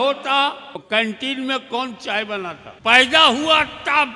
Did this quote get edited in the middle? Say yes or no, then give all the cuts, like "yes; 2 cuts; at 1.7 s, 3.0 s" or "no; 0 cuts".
yes; 2 cuts; at 0.8 s, 2.7 s